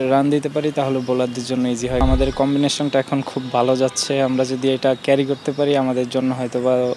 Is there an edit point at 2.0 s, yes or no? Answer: yes